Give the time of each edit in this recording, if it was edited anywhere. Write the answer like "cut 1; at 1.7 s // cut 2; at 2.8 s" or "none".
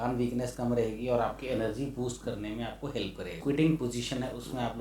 cut 1; at 3.3 s